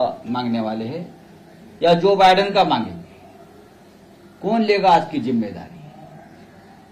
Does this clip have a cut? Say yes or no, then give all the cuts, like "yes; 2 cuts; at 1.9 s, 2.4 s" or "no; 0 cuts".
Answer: no; 0 cuts